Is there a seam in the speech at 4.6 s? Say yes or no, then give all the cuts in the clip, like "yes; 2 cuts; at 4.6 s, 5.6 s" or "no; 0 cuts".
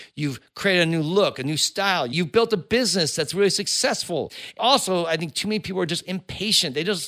yes; 2 cuts; at 2.1 s, 4.6 s